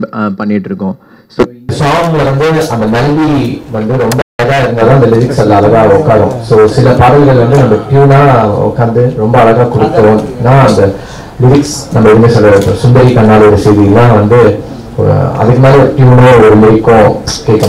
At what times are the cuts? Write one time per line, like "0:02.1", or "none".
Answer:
0:01.7